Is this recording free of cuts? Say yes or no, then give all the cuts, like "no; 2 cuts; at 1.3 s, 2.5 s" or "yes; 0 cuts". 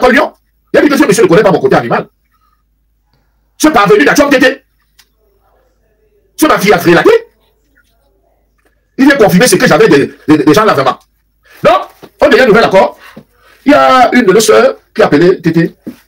yes; 0 cuts